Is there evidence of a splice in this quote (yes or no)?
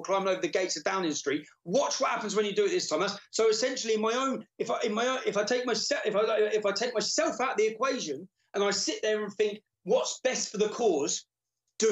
no